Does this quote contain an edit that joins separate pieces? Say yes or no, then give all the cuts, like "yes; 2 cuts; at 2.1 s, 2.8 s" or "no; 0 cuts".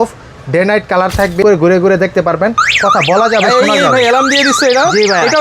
yes; 1 cut; at 1.4 s